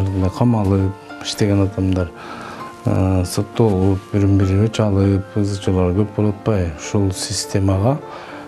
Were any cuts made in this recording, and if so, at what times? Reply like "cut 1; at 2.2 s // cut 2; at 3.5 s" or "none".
none